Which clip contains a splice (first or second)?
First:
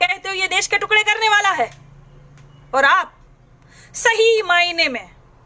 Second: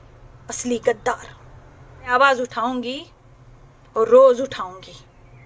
second